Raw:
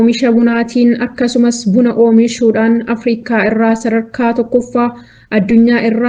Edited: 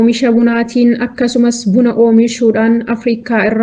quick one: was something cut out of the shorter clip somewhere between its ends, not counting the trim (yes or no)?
no